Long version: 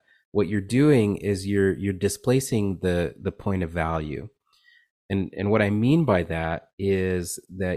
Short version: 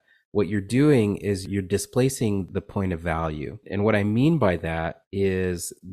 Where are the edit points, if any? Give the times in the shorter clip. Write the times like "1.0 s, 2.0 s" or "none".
1.4 s, 2.5 s, 3.6 s